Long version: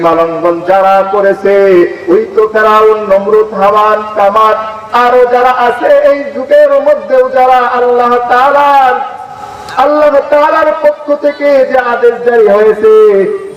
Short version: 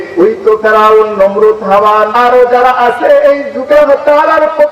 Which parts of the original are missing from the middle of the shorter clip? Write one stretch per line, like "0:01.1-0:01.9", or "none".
0:04.0-0:04.9
0:06.6-0:10.0